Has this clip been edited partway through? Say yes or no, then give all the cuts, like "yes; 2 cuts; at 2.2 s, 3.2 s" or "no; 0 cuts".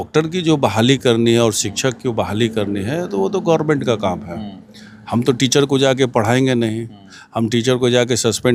no; 0 cuts